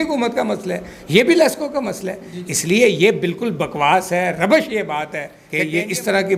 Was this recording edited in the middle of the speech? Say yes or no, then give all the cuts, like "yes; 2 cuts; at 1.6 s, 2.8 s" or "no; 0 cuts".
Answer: no; 0 cuts